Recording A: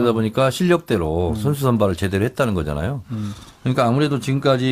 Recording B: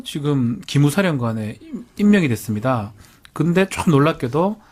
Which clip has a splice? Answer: A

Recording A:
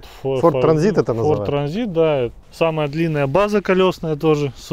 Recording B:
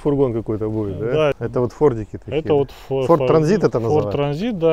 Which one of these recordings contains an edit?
B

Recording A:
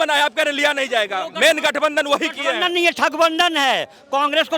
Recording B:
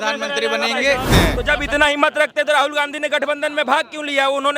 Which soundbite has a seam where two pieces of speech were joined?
B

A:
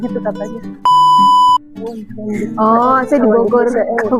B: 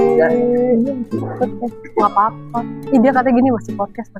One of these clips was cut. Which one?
A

